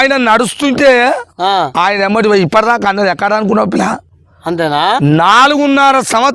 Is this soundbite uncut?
yes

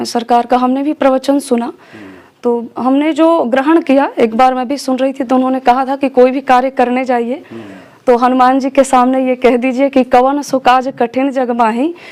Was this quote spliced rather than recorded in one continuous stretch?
no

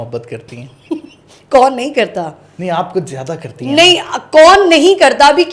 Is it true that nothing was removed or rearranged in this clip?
yes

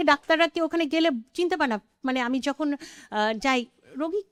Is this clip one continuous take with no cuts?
yes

